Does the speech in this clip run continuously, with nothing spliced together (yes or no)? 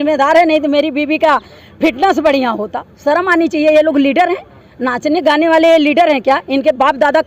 yes